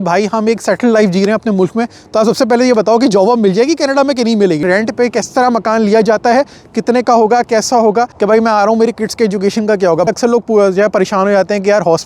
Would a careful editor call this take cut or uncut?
cut